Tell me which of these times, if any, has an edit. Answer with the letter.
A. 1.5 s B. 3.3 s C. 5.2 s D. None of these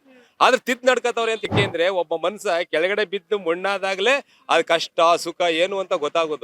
A